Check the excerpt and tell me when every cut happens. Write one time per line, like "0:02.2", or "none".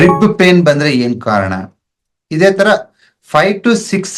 none